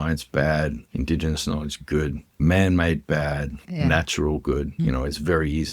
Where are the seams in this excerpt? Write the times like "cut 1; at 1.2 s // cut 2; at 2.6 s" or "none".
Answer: cut 1; at 0.8 s // cut 2; at 2.4 s // cut 3; at 3.6 s // cut 4; at 4.7 s